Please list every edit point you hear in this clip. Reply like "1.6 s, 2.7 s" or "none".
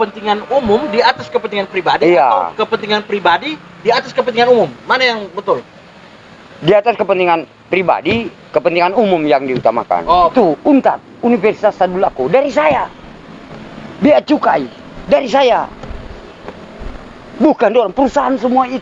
10.3 s